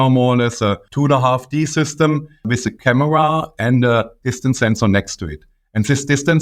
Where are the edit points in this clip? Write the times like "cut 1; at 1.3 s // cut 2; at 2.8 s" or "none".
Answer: cut 1; at 0.8 s // cut 2; at 2.5 s